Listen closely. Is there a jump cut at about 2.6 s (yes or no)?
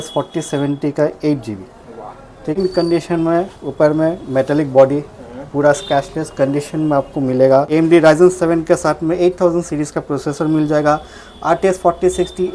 yes